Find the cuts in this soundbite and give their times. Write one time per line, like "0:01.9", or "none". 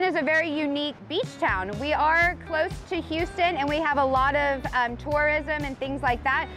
0:01.0